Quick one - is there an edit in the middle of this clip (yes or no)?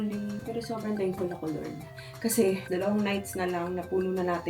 yes